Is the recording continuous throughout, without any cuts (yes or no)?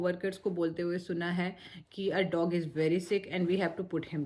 yes